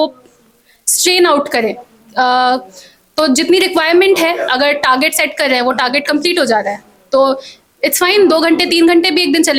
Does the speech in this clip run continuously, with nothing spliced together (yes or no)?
yes